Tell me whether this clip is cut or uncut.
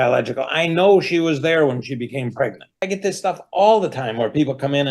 cut